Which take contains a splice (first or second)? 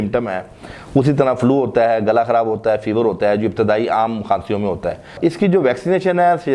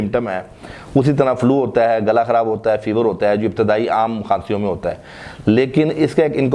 first